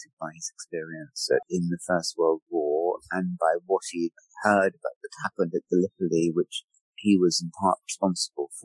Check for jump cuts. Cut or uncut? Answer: cut